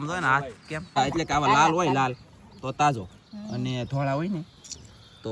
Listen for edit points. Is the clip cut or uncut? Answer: cut